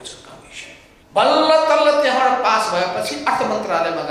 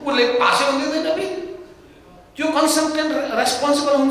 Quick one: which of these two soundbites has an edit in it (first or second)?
first